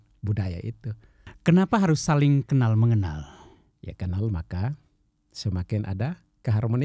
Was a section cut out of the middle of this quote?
yes; 1 cut; at 1.3 s

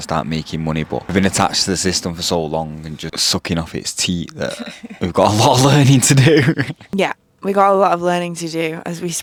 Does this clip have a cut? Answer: no; 0 cuts

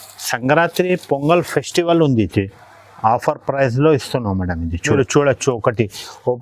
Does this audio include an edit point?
yes; 1 cut; at 4.9 s

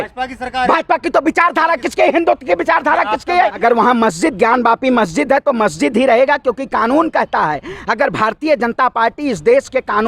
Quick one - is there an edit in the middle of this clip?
yes; 1 cut; at 3.6 s

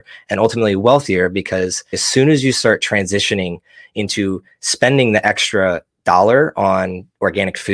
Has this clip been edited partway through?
yes; 1 cut; at 2.0 s

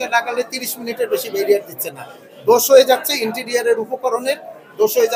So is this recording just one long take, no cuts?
yes; 0 cuts

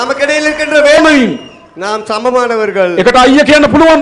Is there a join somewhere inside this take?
yes; 1 cut; at 1.0 s

